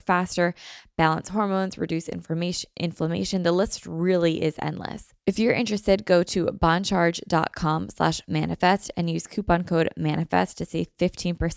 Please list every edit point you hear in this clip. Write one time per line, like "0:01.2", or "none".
0:05.1